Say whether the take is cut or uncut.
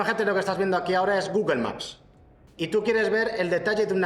uncut